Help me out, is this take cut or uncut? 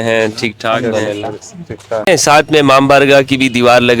cut